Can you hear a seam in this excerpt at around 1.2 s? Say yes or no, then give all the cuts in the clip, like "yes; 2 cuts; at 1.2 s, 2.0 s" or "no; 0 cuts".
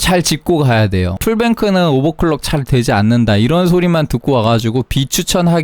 yes; 1 cut; at 1.2 s